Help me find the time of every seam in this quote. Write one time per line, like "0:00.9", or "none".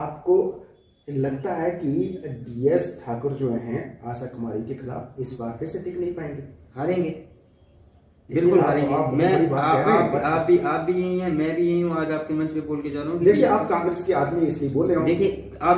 none